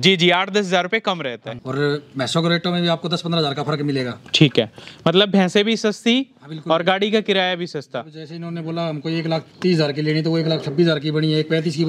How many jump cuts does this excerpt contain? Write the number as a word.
one